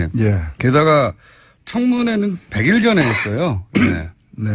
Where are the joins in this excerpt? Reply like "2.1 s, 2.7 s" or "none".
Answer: 1.6 s